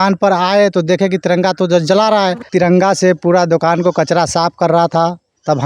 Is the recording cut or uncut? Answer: cut